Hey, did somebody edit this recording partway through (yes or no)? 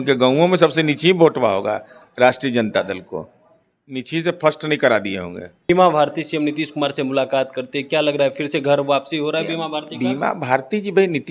yes